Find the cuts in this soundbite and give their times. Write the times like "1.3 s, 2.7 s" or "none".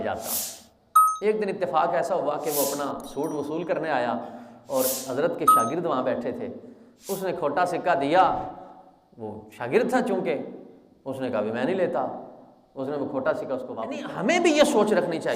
14.0 s

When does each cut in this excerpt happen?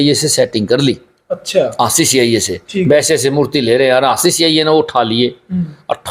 none

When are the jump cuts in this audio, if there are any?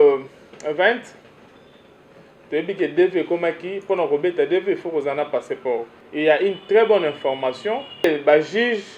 6.0 s, 8.0 s

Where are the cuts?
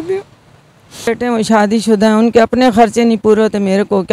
1.1 s

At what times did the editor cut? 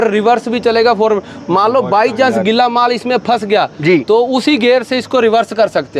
none

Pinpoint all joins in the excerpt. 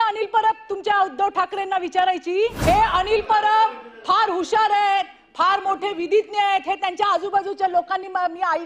2.6 s

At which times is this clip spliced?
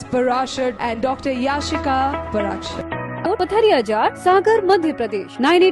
3.2 s

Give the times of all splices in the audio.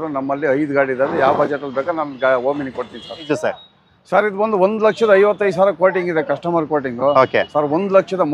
3.3 s

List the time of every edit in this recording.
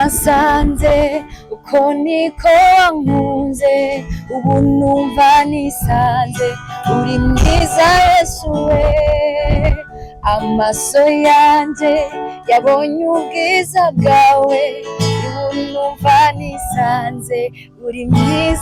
none

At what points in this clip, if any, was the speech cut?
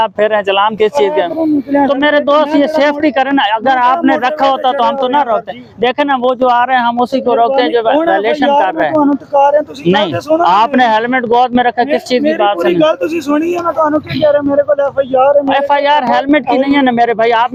none

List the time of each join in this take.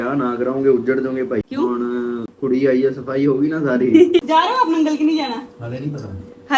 none

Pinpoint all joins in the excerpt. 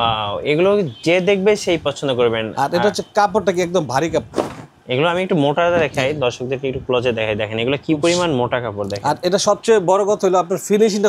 none

